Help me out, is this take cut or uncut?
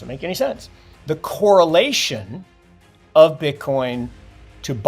cut